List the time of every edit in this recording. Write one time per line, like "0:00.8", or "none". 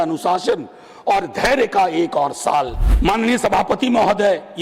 0:02.8